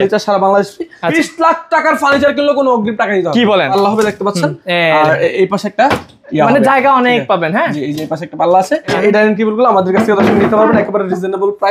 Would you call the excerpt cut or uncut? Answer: cut